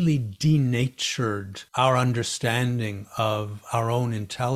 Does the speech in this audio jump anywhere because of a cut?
yes; 1 cut; at 1.6 s

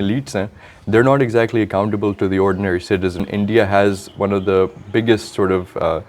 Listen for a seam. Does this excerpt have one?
yes; 1 cut; at 3.2 s

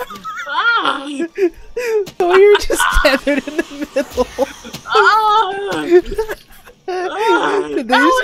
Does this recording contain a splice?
yes; 1 cut; at 2.2 s

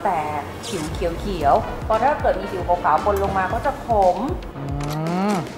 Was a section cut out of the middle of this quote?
no; 0 cuts

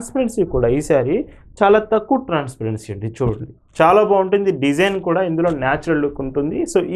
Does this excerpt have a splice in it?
no; 0 cuts

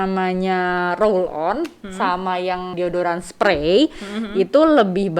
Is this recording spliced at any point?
yes; 1 cut; at 2.7 s

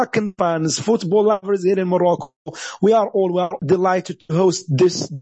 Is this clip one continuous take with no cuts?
no; 1 cut; at 3.6 s

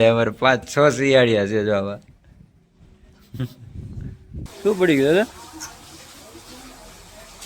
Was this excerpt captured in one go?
no; 1 cut; at 4.5 s

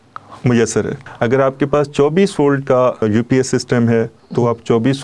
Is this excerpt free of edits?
no; 2 cuts; at 1.0 s, 3.0 s

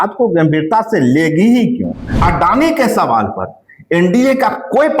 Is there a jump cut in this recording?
yes; 1 cut; at 2.0 s

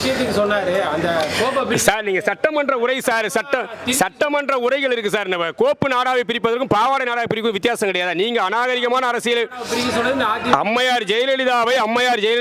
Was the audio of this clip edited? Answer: no; 0 cuts

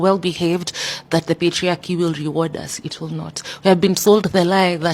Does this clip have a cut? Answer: no; 0 cuts

